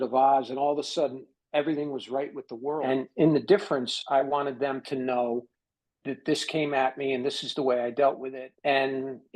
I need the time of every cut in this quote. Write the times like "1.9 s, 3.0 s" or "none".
2.8 s, 8.3 s